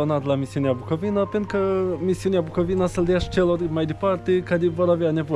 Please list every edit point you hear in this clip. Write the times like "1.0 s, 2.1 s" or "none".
none